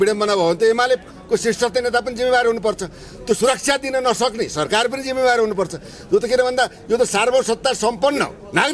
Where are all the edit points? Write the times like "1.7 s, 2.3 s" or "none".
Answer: none

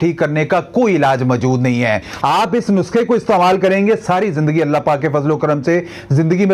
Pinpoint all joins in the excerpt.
2.1 s

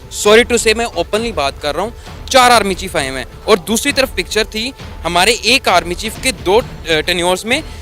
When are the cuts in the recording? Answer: 6.3 s

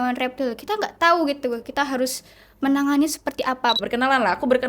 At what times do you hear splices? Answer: 3.8 s

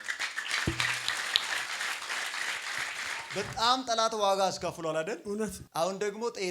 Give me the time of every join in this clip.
3.3 s, 5.6 s

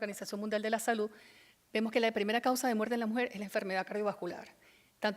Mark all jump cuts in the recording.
none

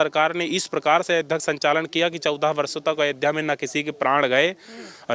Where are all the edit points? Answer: none

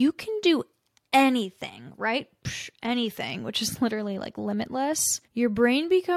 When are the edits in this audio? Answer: none

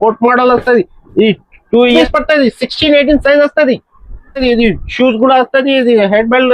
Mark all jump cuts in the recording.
2.0 s, 4.4 s

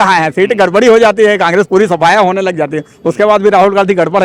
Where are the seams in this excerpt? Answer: none

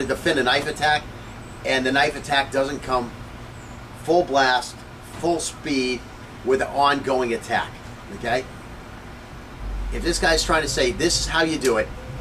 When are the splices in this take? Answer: 8.4 s

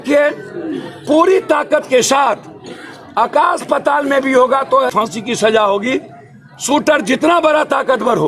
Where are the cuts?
4.9 s

